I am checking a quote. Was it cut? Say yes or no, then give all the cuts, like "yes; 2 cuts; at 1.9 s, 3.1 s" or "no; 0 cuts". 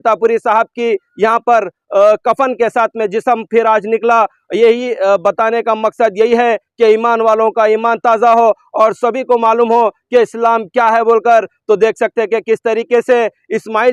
no; 0 cuts